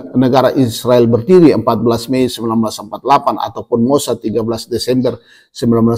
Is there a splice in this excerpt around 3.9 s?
no; 0 cuts

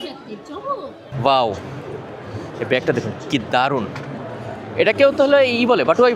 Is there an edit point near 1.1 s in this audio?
yes; 1 cut; at 1.1 s

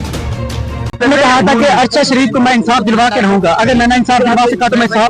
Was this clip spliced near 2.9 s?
no; 1 cut; at 1.0 s

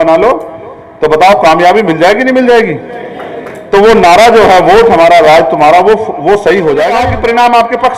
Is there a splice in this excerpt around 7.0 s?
yes; 1 cut; at 7.0 s

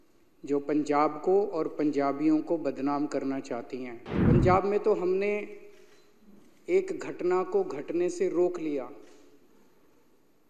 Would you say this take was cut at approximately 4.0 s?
yes; 1 cut; at 4.0 s

